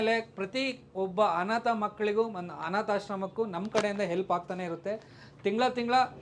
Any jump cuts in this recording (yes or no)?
no